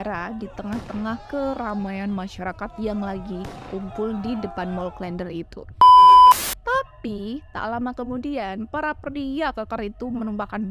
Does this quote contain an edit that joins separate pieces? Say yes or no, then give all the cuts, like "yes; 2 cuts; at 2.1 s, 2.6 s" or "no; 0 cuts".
yes; 2 cuts; at 5.7 s, 6.5 s